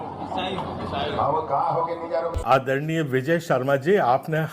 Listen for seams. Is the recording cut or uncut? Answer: cut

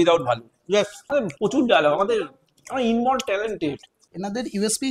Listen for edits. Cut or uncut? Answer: cut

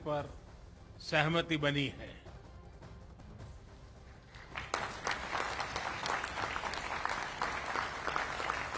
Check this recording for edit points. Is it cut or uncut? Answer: uncut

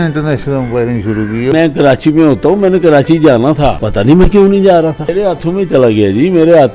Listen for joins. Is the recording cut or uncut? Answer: cut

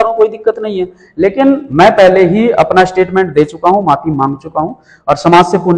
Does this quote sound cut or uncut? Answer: uncut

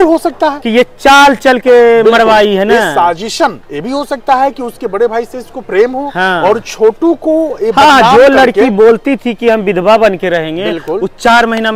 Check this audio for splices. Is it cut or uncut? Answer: uncut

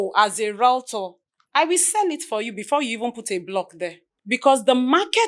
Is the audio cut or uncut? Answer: cut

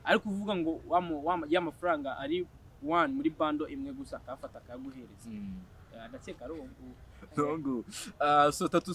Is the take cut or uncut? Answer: uncut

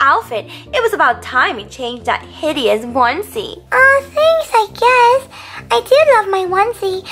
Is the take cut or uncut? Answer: uncut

